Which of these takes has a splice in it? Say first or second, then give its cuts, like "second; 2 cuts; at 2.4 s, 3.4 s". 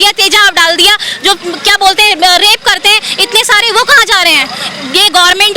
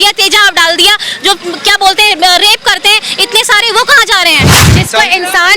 second; 1 cut; at 4.6 s